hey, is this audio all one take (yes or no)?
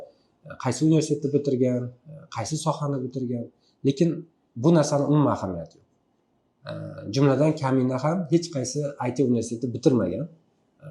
yes